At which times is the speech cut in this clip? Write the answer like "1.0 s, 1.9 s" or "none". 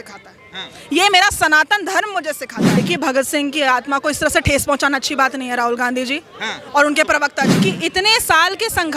2.8 s, 7.5 s